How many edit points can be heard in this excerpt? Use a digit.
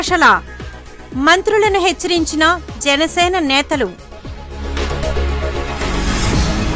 0